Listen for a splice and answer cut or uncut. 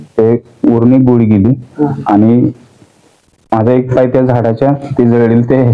uncut